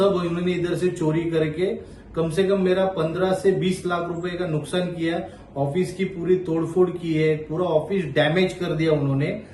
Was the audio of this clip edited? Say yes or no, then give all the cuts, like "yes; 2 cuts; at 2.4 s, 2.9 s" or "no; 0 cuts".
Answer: no; 0 cuts